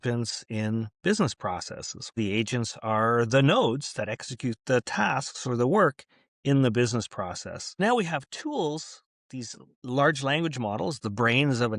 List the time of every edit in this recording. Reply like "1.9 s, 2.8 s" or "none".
2.2 s, 7.7 s